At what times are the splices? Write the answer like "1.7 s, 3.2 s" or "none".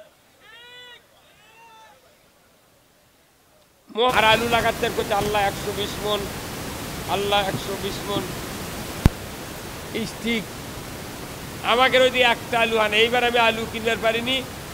4.1 s